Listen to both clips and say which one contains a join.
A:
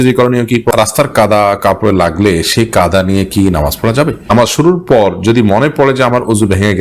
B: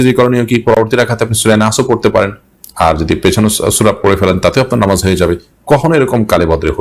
A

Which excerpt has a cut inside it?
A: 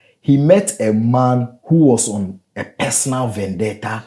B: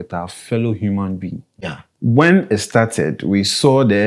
B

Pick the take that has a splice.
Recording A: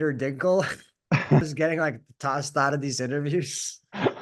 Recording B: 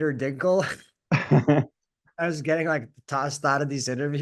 A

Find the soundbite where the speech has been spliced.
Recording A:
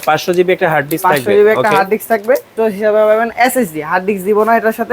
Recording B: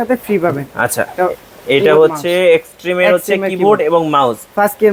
A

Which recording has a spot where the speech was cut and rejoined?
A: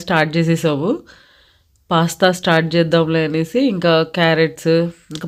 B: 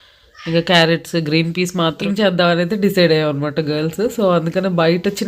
B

